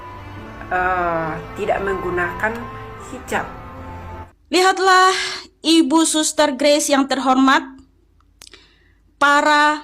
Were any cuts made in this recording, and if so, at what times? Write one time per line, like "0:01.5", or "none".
0:04.0